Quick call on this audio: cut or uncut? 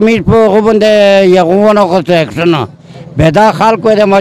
uncut